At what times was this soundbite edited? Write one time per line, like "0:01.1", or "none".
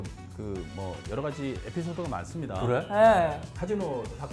none